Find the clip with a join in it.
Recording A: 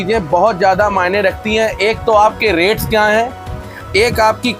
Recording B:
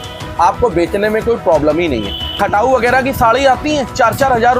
B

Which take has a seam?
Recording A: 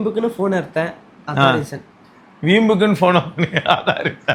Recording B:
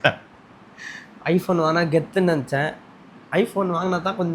B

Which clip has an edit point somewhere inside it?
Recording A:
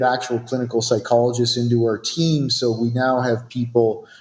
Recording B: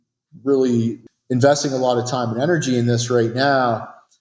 B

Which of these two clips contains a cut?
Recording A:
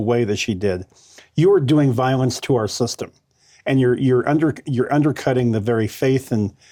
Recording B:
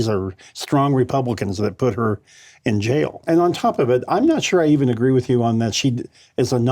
B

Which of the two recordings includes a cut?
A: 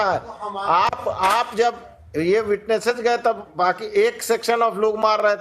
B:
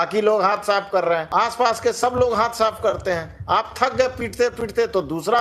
B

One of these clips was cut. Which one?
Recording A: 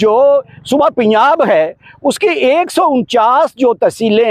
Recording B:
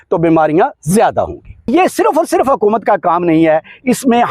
B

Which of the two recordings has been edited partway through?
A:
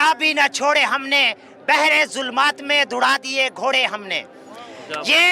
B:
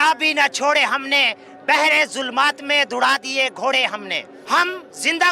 B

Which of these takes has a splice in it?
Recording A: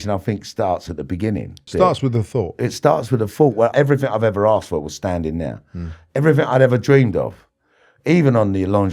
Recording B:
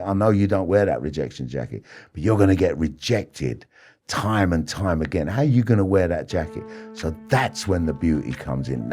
A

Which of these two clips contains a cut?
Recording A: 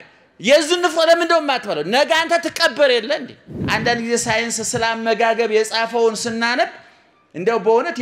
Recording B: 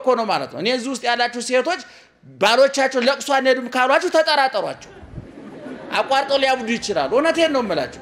A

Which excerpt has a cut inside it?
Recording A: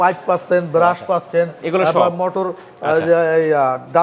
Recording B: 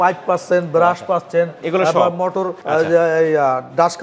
B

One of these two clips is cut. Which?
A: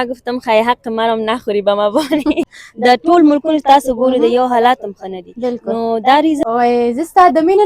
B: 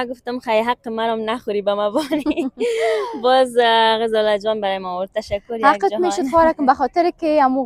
A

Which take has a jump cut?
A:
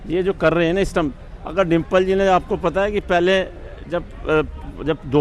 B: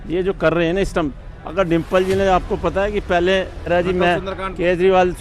B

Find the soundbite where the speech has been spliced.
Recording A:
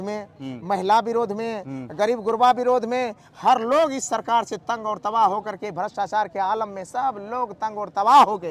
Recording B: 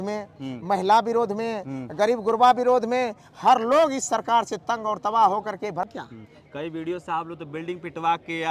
B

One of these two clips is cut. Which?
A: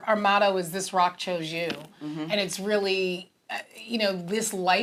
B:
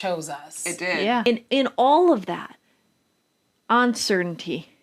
B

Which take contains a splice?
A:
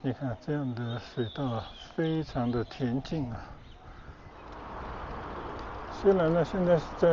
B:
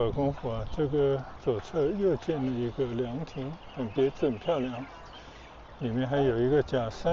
A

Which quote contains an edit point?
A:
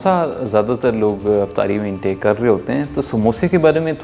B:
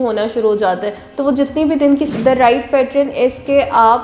B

